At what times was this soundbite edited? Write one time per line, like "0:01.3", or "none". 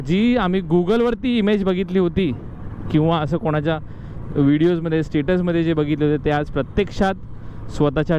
none